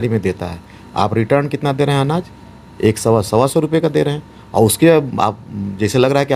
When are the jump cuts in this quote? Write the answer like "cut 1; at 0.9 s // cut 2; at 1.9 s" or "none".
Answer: none